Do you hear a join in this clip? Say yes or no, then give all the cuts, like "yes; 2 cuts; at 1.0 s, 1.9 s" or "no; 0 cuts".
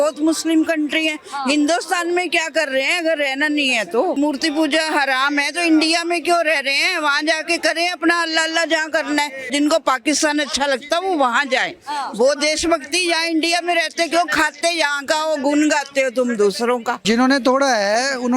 yes; 3 cuts; at 4.2 s, 9.5 s, 16.9 s